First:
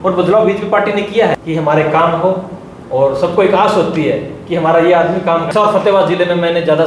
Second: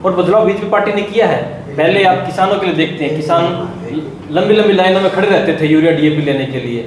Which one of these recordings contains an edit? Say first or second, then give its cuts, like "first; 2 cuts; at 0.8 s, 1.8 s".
first; 2 cuts; at 1.4 s, 5.5 s